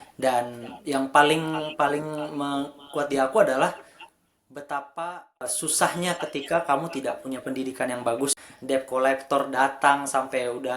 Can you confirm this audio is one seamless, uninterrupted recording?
no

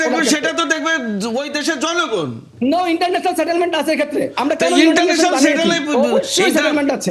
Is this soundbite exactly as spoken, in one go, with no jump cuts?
yes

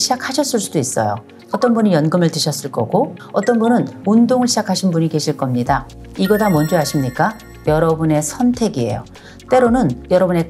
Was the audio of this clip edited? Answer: yes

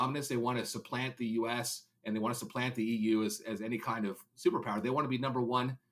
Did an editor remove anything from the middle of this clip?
no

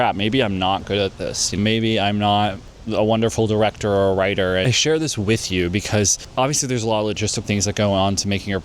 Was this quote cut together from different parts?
yes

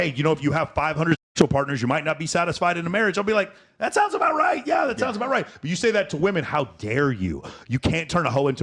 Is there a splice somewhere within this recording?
no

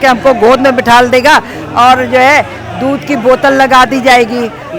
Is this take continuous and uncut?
yes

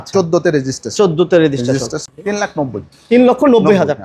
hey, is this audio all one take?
no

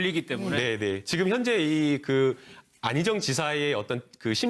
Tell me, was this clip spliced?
no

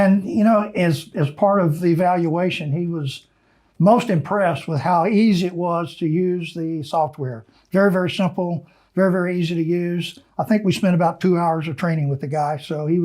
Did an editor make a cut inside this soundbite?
no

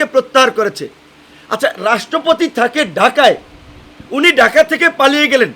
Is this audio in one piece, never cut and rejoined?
yes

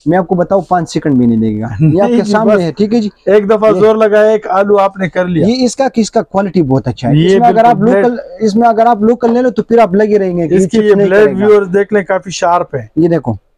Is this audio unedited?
yes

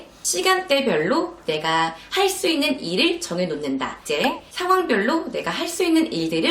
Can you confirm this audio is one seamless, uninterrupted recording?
no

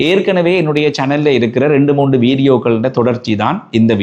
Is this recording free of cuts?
yes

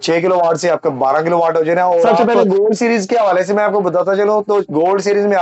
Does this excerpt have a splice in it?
yes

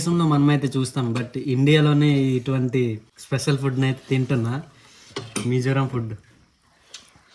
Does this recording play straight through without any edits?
yes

